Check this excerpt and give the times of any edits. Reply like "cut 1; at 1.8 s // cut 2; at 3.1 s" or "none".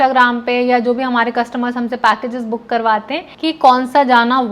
cut 1; at 3.2 s